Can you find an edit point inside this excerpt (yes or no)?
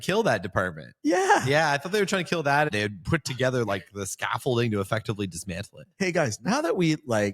yes